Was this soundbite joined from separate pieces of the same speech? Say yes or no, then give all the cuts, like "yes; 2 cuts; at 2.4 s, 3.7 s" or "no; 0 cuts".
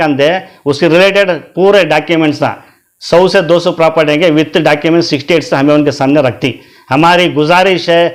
no; 0 cuts